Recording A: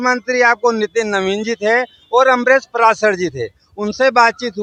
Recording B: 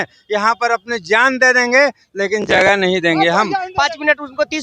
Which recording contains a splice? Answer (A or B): B